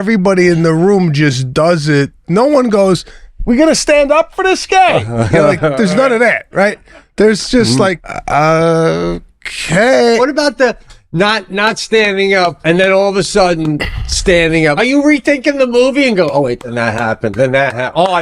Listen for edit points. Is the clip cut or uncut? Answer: cut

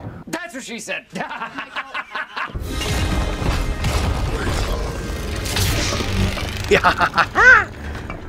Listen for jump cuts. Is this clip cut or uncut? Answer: cut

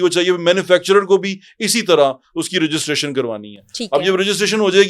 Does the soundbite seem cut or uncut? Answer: uncut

